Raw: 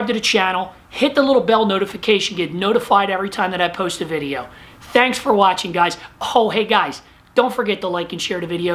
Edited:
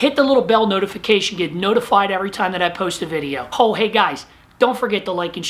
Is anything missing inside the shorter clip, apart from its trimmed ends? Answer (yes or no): yes